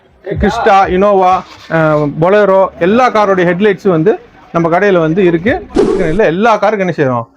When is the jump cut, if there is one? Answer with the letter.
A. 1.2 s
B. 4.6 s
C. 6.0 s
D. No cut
C